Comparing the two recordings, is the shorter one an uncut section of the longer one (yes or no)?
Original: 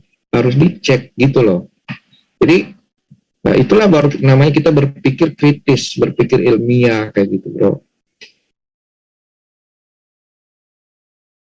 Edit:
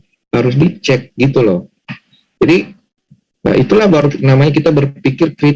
yes